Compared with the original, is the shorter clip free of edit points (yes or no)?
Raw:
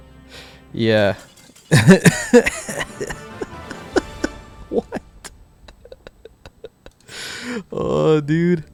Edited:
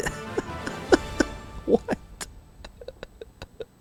yes